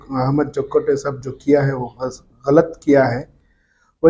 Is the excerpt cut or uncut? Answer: uncut